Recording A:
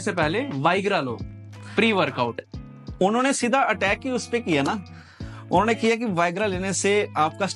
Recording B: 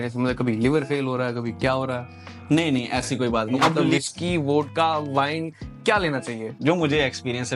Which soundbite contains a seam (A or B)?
B